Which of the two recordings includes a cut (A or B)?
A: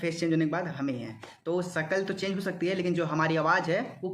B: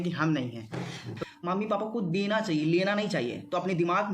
B